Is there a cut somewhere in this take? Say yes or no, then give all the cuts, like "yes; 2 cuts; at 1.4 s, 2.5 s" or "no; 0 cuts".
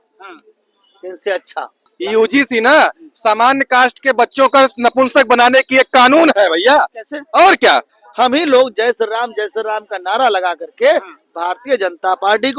yes; 2 cuts; at 1.8 s, 8.0 s